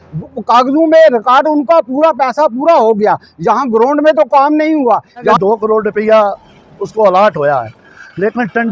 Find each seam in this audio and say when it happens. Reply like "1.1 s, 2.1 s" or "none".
5.2 s